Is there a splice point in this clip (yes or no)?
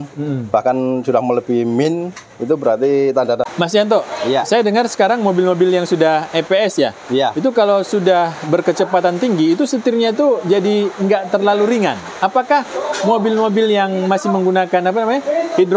yes